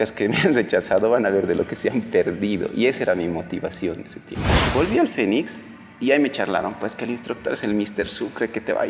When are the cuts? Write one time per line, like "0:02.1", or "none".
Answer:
0:04.5